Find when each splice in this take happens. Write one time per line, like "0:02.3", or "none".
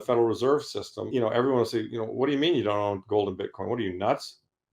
0:01.0